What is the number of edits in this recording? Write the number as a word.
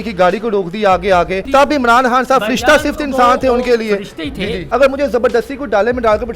two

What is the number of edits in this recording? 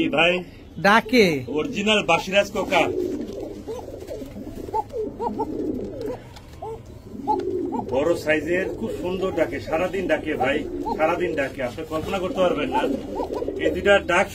zero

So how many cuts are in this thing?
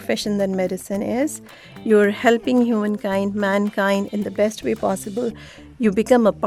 zero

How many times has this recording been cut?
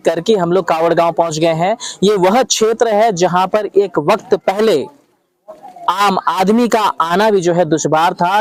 zero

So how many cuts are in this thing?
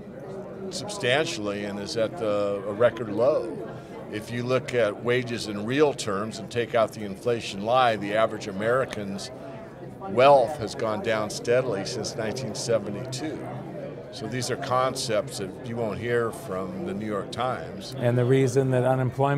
one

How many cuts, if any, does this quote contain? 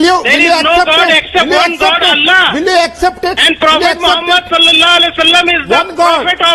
zero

